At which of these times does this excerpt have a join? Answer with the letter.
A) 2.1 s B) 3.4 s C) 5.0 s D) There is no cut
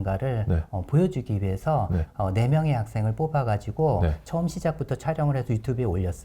A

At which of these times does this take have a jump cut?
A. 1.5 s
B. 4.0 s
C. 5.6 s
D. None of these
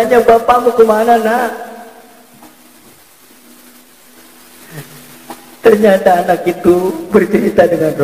B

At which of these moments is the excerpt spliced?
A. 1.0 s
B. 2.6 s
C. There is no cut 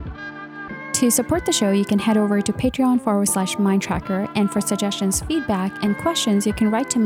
A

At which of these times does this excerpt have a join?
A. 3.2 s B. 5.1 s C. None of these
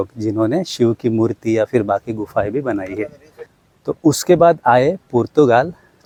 C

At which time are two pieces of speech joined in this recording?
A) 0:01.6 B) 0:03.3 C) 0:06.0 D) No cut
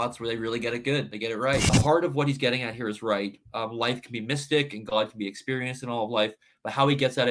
A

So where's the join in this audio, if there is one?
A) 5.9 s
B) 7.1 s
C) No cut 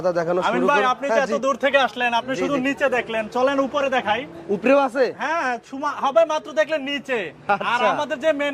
C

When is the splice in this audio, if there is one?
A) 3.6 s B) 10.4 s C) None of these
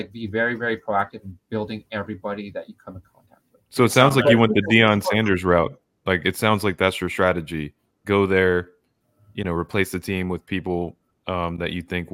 A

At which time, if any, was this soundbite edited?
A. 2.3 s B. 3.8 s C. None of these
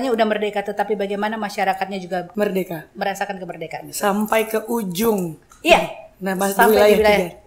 A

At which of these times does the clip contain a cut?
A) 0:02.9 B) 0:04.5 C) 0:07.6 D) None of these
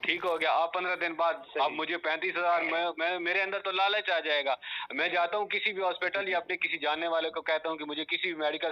D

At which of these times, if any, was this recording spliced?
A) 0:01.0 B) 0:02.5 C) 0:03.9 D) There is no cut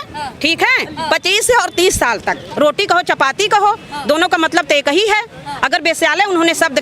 B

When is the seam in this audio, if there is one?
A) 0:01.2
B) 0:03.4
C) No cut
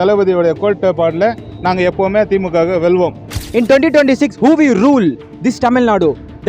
B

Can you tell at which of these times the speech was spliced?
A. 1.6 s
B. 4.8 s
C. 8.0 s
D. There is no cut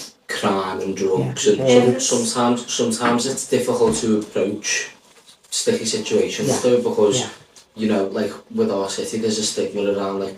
A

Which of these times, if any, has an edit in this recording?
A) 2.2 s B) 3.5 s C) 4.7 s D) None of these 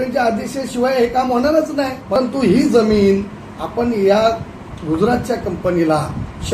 A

